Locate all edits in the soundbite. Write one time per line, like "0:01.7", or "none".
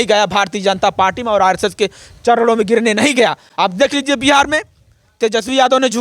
none